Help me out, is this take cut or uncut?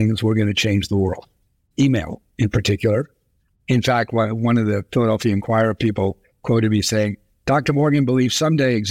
uncut